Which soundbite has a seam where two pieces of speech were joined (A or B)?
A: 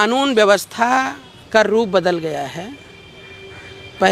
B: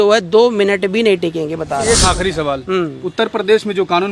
B